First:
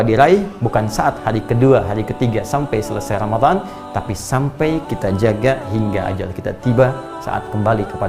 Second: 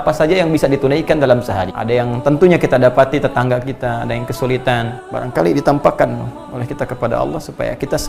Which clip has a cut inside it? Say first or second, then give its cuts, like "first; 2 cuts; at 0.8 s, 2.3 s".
second; 2 cuts; at 1.7 s, 5.0 s